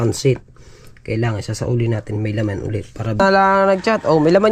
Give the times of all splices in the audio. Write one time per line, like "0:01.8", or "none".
0:03.2